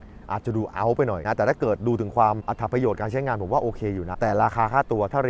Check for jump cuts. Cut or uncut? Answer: cut